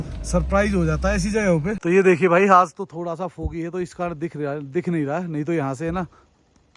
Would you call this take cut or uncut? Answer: cut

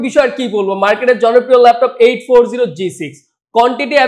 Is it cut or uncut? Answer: uncut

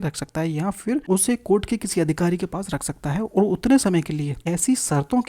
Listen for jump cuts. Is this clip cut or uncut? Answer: cut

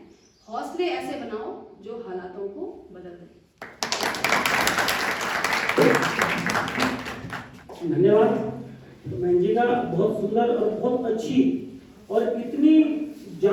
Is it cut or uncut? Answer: uncut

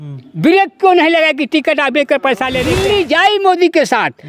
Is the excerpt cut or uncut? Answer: cut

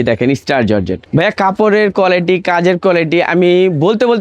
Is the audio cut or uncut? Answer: cut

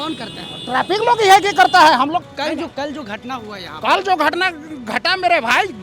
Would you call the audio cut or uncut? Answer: cut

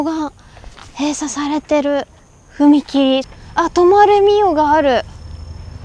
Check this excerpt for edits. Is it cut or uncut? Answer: cut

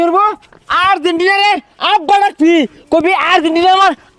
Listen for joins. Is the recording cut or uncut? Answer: uncut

